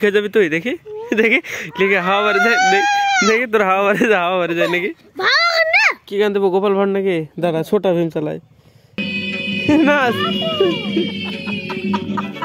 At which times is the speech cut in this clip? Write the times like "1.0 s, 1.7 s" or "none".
5.1 s, 6.0 s, 9.0 s